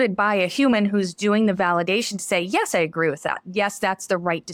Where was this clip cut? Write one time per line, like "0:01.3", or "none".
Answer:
none